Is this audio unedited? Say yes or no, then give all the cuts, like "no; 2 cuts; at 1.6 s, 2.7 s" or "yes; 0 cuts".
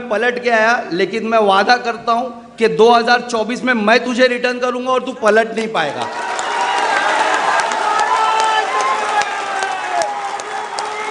yes; 0 cuts